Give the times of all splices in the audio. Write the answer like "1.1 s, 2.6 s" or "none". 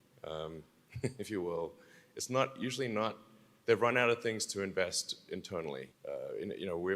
5.9 s